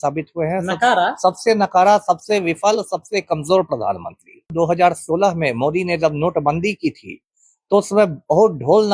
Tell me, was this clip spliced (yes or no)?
yes